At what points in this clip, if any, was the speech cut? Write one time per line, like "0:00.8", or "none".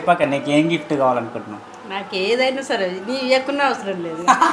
none